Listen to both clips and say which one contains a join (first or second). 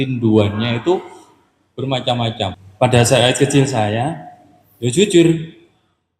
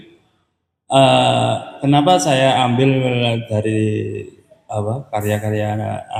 first